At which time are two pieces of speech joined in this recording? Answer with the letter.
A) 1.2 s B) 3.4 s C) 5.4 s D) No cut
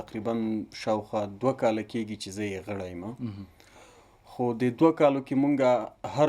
D